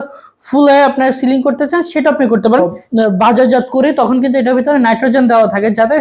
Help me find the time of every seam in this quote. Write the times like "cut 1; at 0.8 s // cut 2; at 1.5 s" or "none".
cut 1; at 2.7 s